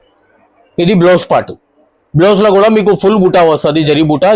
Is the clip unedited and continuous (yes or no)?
yes